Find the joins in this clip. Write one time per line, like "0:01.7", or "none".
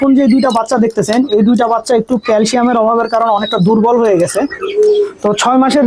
0:04.6